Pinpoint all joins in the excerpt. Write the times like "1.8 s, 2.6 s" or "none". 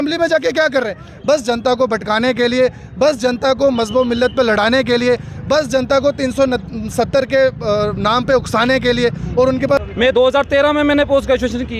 9.8 s